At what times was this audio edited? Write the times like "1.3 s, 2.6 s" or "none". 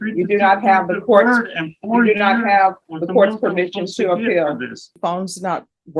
4.9 s